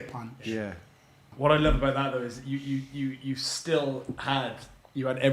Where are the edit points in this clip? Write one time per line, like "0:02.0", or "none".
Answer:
0:01.2